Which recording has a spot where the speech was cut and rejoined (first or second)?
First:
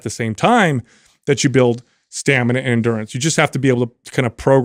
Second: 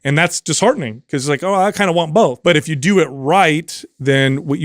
second